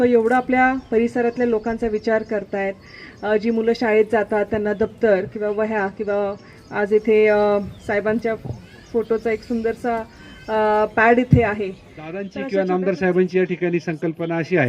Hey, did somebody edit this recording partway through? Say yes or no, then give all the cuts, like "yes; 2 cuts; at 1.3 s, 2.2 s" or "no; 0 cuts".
yes; 1 cut; at 12.4 s